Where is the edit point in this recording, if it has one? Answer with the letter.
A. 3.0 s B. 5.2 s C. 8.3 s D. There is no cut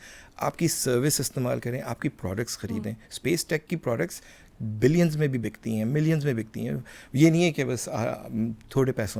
D